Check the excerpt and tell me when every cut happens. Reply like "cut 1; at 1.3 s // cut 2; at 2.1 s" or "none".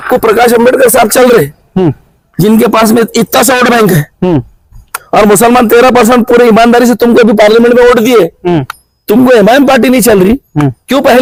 none